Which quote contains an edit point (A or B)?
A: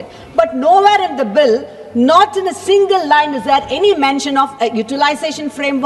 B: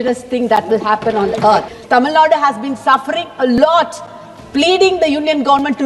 B